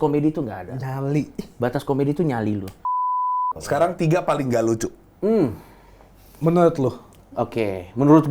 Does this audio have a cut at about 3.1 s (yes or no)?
yes